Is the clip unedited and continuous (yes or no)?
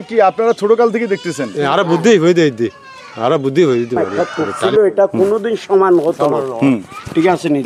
no